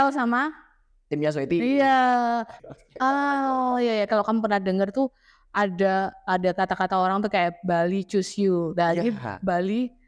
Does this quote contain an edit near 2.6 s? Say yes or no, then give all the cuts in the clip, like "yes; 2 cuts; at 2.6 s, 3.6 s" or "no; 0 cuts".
yes; 1 cut; at 2.6 s